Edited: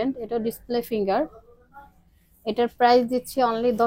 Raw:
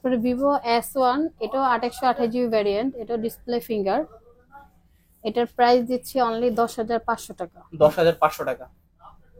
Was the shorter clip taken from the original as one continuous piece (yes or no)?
yes